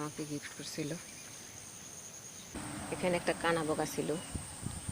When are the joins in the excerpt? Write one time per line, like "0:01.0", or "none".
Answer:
0:02.6